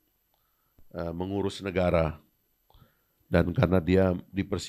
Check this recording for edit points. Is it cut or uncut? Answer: uncut